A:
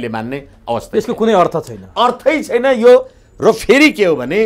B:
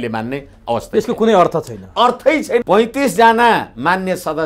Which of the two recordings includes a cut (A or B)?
B